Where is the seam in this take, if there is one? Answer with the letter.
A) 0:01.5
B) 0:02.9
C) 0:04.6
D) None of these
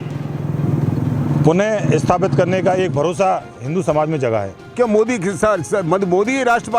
C